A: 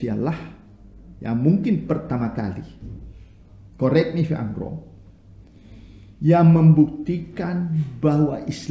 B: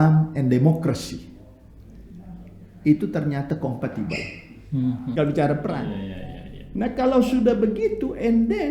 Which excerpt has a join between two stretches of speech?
B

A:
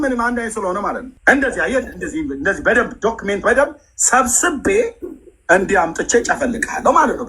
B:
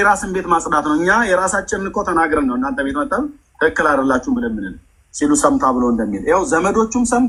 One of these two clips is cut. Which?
A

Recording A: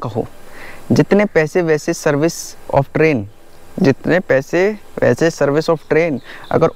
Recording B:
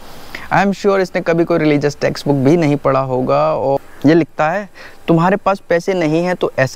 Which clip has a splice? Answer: B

